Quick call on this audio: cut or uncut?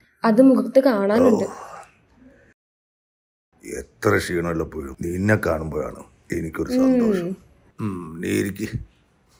uncut